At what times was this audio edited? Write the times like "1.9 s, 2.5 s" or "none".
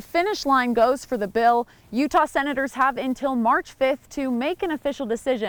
none